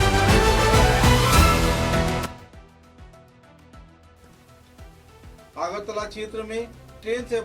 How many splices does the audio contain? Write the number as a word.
one